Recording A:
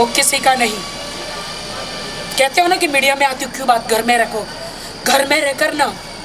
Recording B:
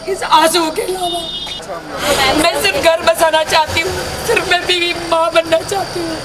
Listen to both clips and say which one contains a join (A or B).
B